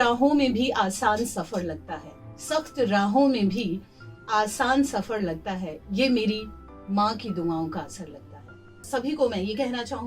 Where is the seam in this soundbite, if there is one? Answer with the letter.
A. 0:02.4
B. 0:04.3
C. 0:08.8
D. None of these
C